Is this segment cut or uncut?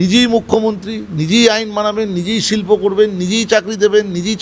uncut